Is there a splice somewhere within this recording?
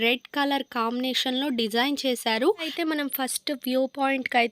yes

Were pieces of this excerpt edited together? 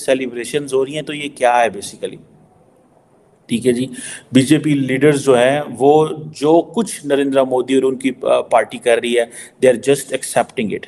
no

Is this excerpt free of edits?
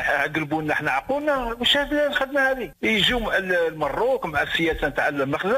no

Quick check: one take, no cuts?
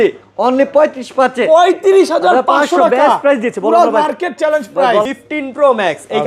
no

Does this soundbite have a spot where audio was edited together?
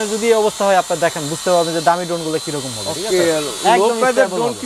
no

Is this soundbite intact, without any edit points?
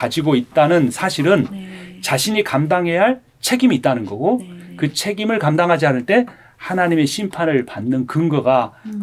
yes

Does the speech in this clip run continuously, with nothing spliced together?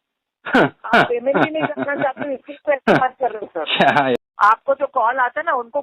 no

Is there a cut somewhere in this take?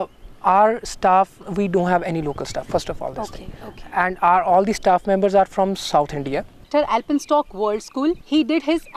yes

